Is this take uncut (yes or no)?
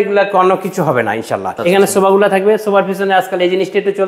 no